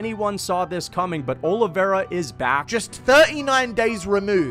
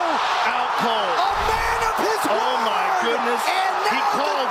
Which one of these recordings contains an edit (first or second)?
first